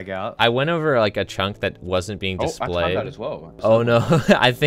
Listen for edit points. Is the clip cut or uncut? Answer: cut